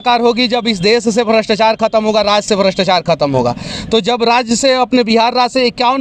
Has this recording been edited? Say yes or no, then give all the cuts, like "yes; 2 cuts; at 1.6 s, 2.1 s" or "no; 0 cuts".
no; 0 cuts